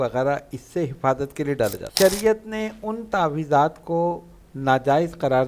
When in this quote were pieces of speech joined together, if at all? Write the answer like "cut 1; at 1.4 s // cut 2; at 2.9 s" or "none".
cut 1; at 1.8 s